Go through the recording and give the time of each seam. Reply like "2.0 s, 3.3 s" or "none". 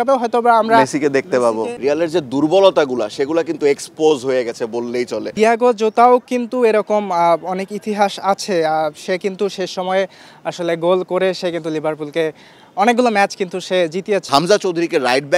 1.6 s, 5.4 s, 14.2 s